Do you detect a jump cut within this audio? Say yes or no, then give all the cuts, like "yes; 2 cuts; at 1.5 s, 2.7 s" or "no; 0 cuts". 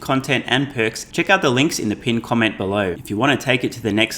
yes; 2 cuts; at 1.0 s, 3.0 s